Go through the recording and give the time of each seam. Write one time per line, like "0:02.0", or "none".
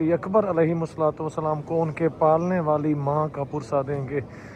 none